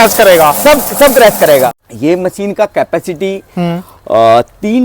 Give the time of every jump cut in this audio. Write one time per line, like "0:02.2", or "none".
0:01.7